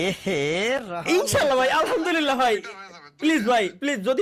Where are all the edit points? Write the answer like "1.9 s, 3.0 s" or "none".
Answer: none